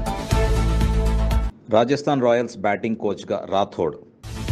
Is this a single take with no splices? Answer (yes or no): yes